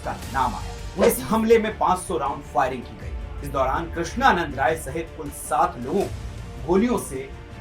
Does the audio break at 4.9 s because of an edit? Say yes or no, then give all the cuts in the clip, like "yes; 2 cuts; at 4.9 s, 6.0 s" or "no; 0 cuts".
no; 1 cut; at 1.1 s